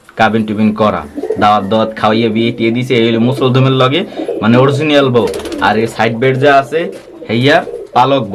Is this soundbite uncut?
yes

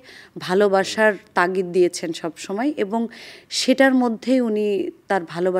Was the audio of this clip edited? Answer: no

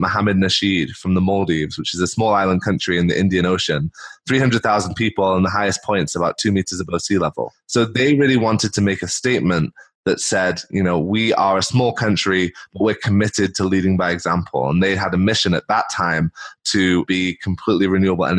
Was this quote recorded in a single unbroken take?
yes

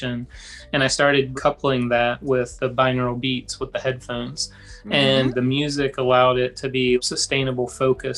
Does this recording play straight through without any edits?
no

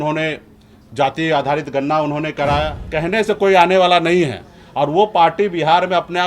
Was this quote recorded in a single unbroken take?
no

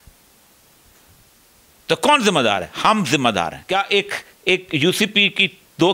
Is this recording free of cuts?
no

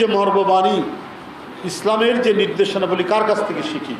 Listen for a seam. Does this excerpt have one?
no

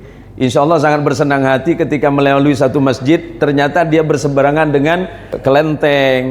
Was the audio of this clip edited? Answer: yes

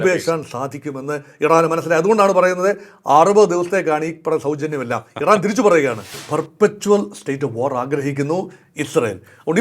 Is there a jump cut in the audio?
yes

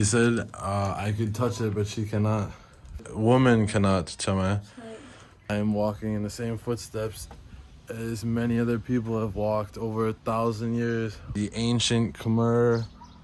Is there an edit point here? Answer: yes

